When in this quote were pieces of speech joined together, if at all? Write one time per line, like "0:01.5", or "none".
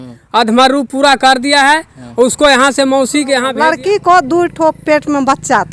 0:03.5

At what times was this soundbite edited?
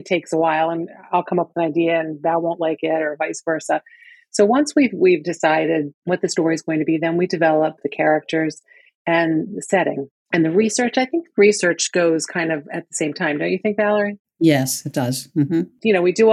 0:05.9

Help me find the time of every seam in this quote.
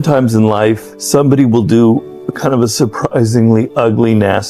none

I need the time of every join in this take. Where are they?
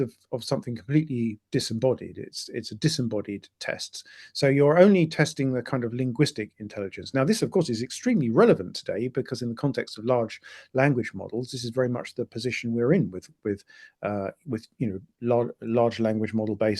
none

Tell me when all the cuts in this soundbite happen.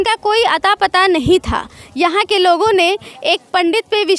none

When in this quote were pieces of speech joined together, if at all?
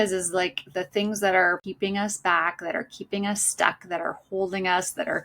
0:01.7

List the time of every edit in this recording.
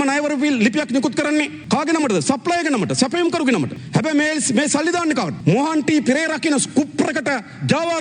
0:01.6
0:03.8
0:05.3

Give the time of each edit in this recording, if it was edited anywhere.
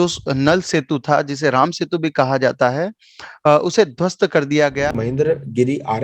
0:04.9

